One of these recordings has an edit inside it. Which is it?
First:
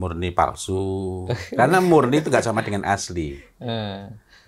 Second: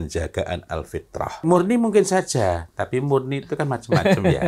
second; 1 cut; at 1.3 s

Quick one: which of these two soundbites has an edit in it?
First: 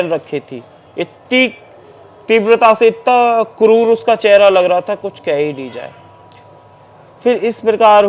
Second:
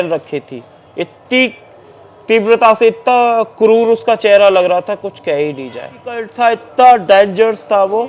second; 1 cut; at 6.3 s

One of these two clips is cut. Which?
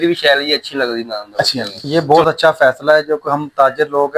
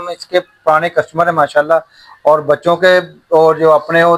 first; 1 cut; at 1.7 s

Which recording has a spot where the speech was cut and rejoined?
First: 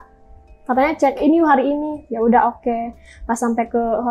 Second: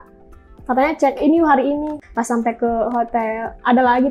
second; 1 cut; at 2.0 s

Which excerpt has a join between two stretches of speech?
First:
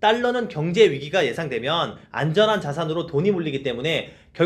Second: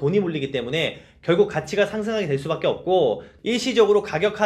second; 1 cut; at 3.3 s

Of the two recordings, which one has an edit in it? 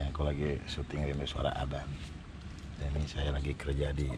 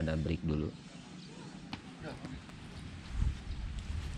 second; 1 cut; at 1.7 s

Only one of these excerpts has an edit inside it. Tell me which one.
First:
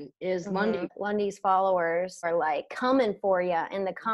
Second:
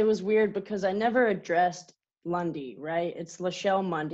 first; 2 cuts; at 1.0 s, 2.3 s

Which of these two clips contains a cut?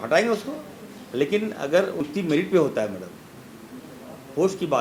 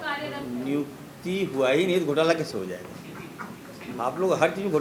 first; 1 cut; at 2.0 s

